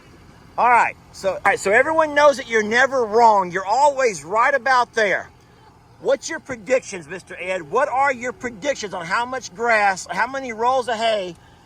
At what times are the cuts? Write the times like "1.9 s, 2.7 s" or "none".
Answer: 1.5 s